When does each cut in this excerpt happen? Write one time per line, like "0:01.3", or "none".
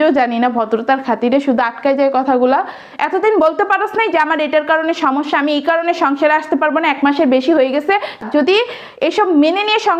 0:08.2

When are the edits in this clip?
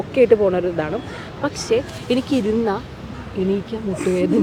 none

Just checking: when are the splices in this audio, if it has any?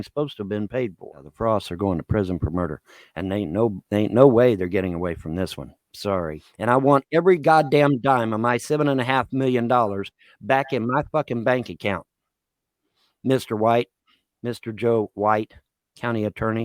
0:01.3
0:06.4

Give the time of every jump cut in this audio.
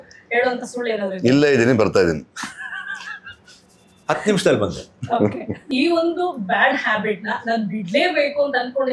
0:05.6

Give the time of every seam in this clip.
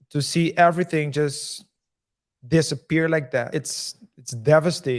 0:03.5

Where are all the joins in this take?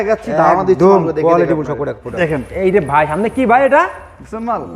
0:02.0

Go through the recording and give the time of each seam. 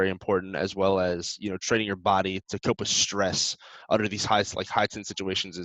none

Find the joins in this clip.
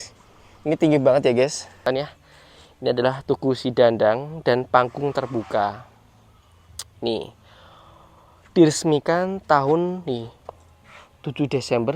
0:01.8

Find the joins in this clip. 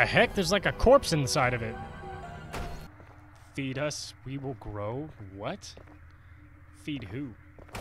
0:02.9

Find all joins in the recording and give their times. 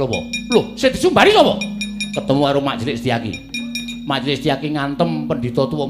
none

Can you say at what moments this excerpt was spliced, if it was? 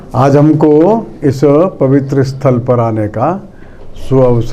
none

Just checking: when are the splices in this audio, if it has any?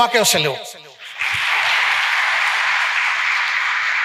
none

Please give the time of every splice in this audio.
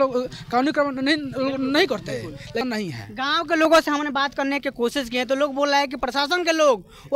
0:02.6

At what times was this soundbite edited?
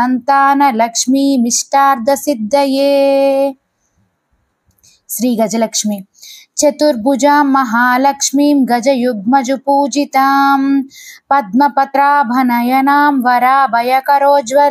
0:11.9

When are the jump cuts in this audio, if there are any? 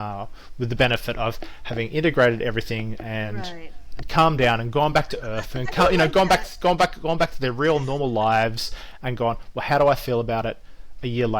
none

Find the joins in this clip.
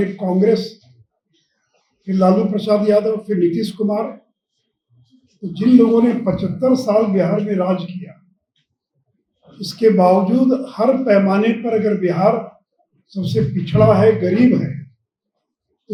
none

